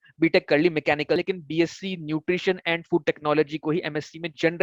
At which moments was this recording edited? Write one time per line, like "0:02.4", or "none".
0:01.2